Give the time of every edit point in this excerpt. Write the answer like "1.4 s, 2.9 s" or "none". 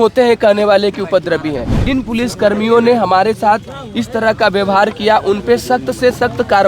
1.8 s